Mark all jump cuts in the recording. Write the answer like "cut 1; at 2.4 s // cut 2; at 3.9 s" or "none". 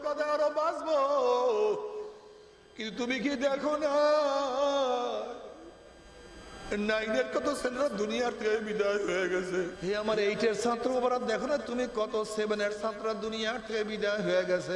cut 1; at 9.8 s

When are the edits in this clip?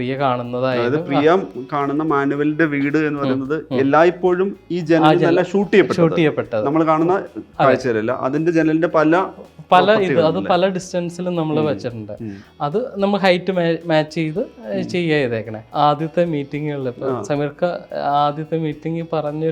cut 1; at 15.6 s

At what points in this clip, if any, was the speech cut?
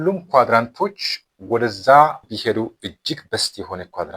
cut 1; at 2.3 s

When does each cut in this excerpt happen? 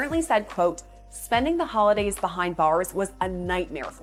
none

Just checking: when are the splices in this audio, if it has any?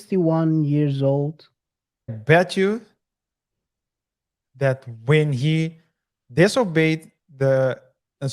cut 1; at 2.2 s

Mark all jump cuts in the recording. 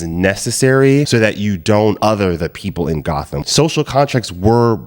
cut 1; at 2.0 s // cut 2; at 3.4 s

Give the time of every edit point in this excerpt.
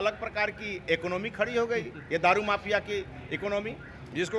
none

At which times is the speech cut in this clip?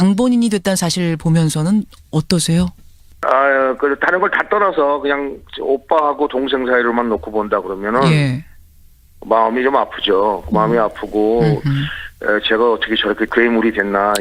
none

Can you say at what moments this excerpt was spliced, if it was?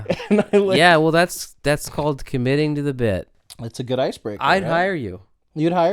cut 1; at 3.4 s

